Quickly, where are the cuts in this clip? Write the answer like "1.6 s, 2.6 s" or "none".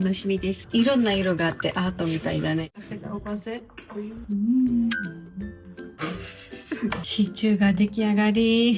2.8 s